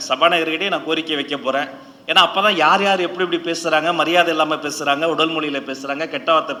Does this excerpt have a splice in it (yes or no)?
no